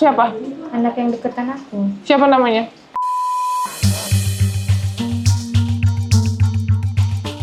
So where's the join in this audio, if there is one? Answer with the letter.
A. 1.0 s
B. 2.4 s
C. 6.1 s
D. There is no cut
D